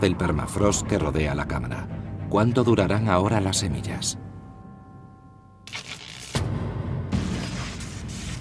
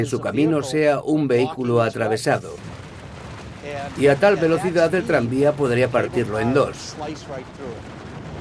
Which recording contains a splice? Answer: first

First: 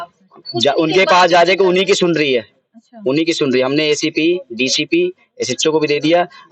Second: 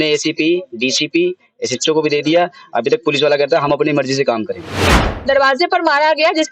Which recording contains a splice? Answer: second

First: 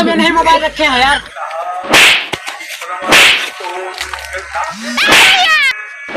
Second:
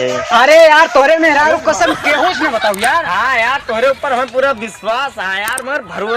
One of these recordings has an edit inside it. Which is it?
first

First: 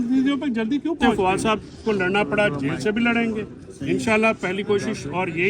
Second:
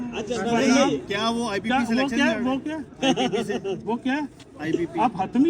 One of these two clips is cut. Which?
first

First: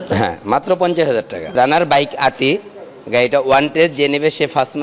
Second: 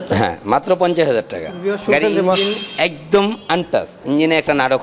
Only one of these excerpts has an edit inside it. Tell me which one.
first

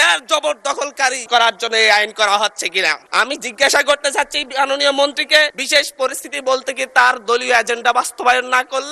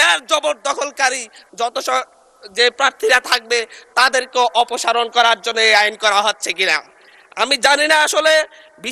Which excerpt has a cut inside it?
first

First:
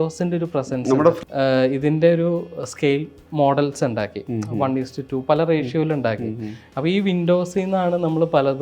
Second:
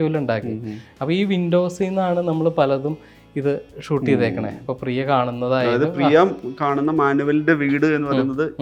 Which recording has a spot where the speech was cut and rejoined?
first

